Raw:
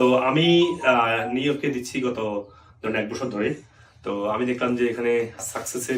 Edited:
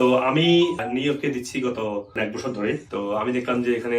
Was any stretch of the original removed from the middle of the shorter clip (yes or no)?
yes